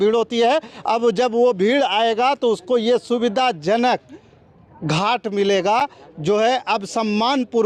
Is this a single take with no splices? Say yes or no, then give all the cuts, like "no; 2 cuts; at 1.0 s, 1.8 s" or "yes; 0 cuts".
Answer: yes; 0 cuts